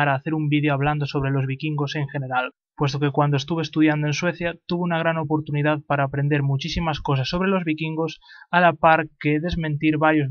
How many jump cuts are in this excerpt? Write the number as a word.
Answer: one